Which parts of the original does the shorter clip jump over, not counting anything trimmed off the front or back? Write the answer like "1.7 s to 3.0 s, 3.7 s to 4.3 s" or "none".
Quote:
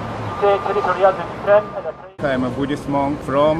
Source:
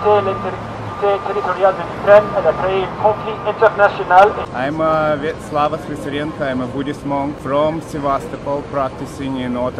2.6 s to 6.2 s